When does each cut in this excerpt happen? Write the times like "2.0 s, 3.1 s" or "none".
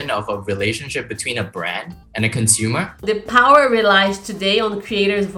2.0 s, 3.0 s